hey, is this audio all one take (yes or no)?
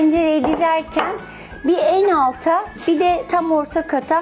no